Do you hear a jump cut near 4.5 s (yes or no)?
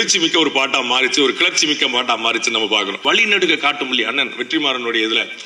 no